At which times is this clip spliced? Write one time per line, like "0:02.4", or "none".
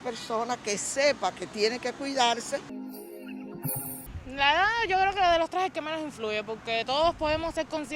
0:02.8
0:04.0